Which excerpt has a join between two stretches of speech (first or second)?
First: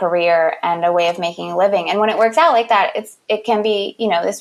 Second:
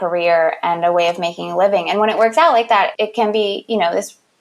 second